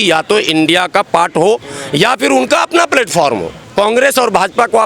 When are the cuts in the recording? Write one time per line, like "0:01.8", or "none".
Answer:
0:03.6